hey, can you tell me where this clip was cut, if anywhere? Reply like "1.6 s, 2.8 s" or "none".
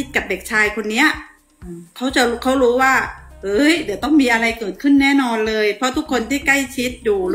none